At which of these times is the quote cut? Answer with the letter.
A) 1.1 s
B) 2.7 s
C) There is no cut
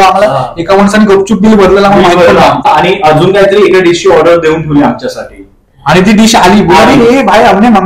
B